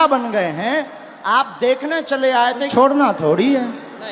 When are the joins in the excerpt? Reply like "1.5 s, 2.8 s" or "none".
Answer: 2.7 s